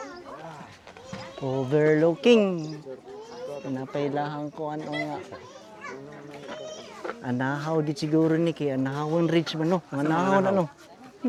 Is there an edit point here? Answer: no; 0 cuts

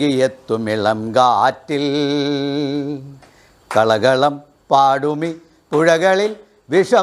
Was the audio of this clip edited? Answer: no; 0 cuts

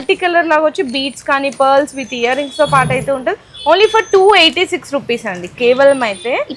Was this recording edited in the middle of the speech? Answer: no; 0 cuts

